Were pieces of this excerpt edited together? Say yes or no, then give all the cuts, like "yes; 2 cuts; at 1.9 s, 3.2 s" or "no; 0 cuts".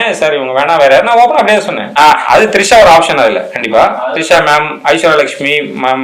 yes; 1 cut; at 1.9 s